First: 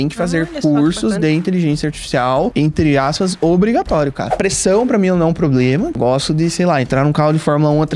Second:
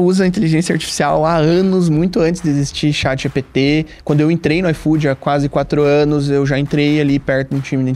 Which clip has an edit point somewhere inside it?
first; 3 cuts; at 2.5 s, 4.4 s, 6.0 s

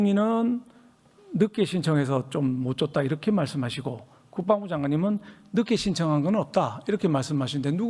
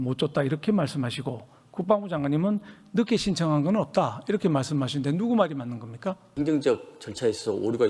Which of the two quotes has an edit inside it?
second; 1 cut; at 6.3 s

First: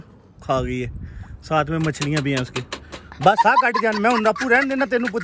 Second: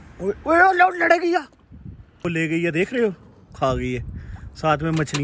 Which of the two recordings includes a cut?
second; 1 cut; at 2.0 s

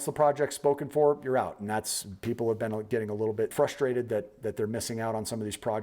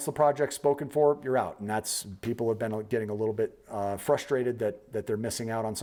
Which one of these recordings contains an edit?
first; 1 cut; at 3.5 s

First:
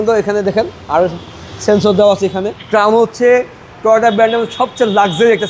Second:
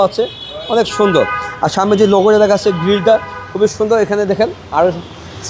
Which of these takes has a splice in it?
first; 1 cut; at 2.6 s

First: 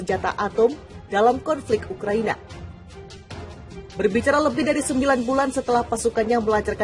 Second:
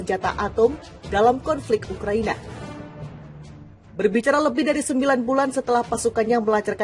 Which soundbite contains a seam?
first; 2 cuts; at 2.6 s, 3.9 s

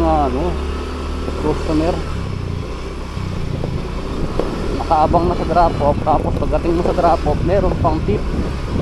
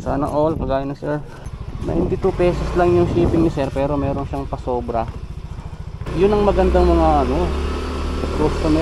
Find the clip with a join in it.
second; 2 cuts; at 1.4 s, 6.0 s

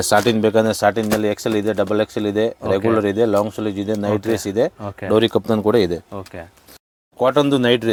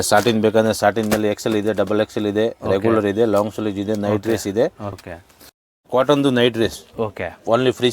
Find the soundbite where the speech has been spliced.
second; 1 cut; at 4.9 s

